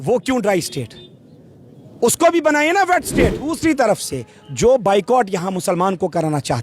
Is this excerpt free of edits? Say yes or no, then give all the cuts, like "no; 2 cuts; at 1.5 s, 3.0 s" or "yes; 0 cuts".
no; 1 cut; at 3.6 s